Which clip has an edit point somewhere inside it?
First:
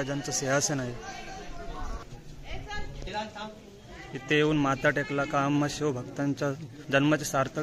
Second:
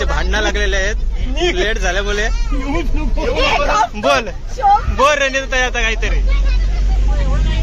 first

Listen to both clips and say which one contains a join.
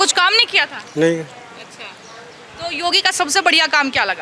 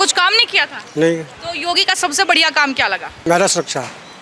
second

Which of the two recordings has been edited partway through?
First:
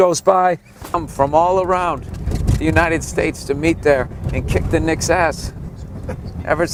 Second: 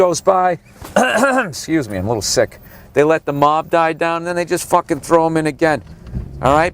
second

